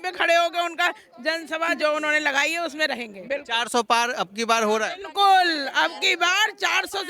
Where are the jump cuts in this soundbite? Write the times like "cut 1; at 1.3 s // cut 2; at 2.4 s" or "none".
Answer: none